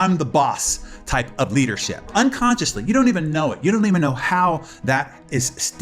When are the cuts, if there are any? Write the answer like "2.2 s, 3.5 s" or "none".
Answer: 2.1 s